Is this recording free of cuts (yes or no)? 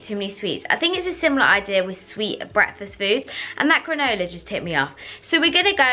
yes